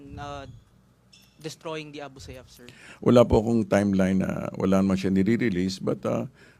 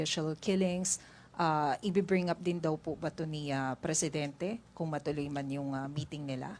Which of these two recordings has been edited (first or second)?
first